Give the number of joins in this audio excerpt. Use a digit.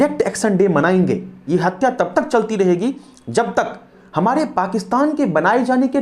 2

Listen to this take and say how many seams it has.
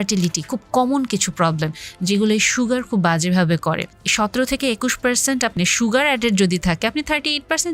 2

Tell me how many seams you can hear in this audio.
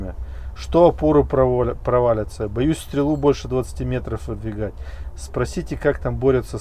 0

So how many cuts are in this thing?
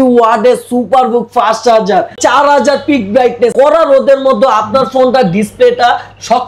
2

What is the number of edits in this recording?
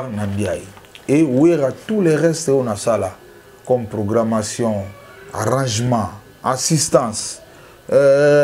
0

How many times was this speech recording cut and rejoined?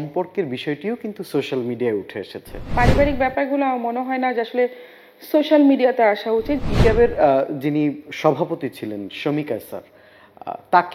2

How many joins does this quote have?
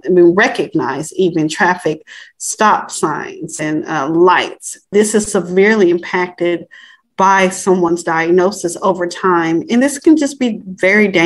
0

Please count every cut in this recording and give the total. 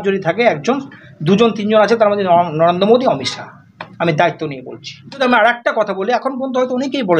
1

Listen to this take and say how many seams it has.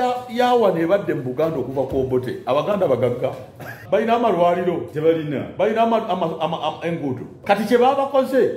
2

